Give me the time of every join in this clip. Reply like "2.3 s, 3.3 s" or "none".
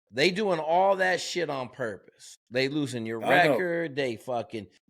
none